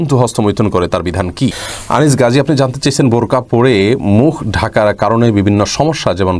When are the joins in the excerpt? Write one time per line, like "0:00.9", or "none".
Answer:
0:01.7